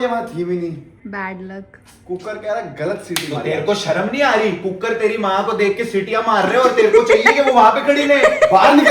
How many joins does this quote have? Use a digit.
1